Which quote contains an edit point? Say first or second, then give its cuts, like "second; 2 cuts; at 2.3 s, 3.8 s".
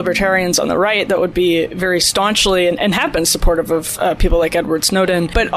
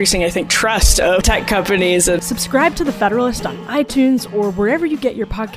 second; 2 cuts; at 1.2 s, 2.2 s